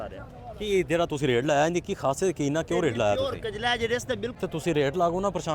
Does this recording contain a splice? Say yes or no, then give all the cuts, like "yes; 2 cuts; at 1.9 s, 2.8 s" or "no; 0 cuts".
yes; 1 cut; at 4.4 s